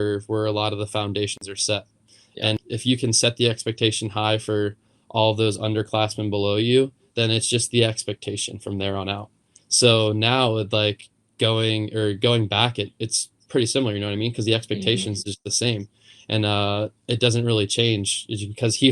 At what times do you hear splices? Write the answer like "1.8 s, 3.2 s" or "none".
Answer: 2.6 s

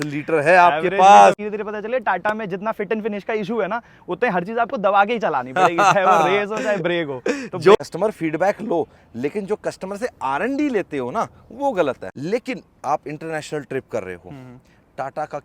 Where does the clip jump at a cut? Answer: 1.4 s, 7.8 s, 12.1 s

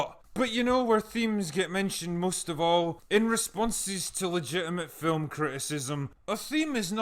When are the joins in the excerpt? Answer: 6.1 s

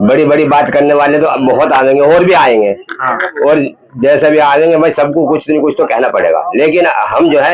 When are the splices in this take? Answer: none

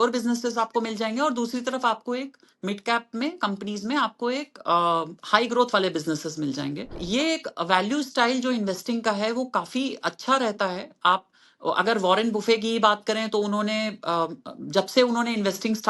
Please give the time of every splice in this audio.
7.0 s

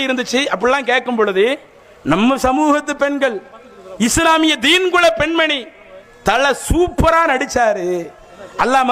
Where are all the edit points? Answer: none

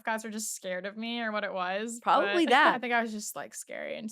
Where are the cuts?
2.8 s

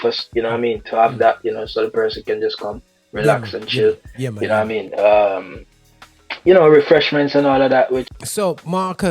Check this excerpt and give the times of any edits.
8.1 s

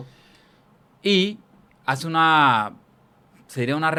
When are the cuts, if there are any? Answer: none

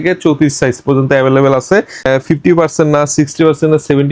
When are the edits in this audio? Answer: 2.0 s

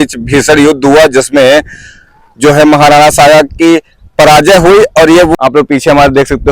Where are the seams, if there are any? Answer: 5.3 s

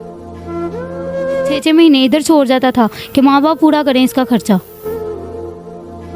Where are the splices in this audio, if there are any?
1.6 s

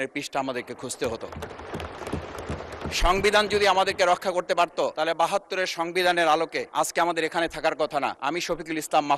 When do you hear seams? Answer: 4.9 s, 6.6 s, 8.2 s

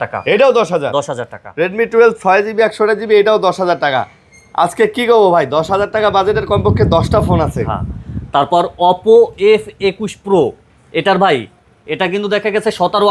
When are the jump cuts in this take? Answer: none

